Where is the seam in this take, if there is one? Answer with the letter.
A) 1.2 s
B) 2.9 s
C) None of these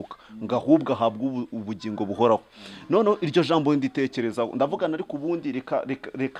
C